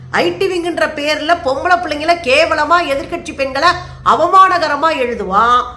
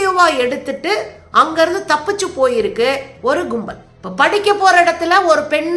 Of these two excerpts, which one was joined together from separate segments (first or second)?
second